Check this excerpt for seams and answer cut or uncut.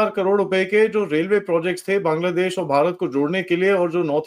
uncut